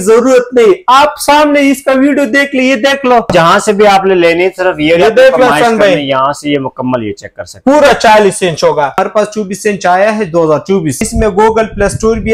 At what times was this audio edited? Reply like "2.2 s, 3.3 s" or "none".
3.3 s, 9.0 s, 11.0 s